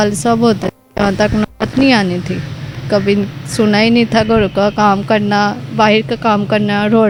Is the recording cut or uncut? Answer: uncut